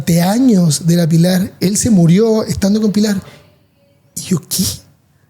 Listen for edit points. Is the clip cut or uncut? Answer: cut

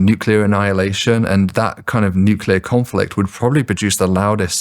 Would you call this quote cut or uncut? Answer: uncut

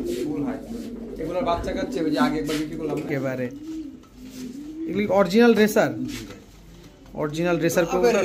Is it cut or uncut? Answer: cut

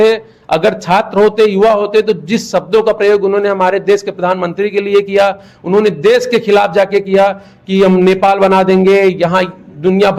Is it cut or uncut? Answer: uncut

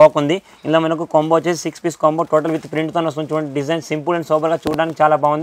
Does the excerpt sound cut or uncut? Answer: uncut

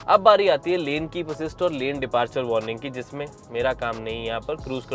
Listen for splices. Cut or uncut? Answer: uncut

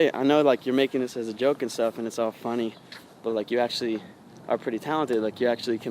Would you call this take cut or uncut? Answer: uncut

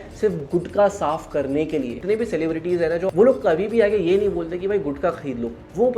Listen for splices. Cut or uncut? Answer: cut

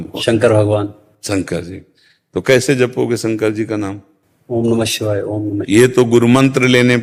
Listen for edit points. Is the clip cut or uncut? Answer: uncut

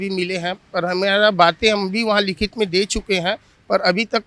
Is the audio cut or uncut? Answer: uncut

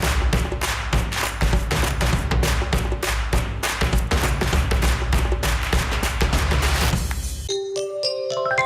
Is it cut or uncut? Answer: cut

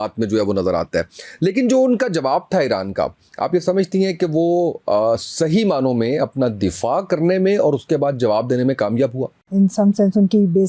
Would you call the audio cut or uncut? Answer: cut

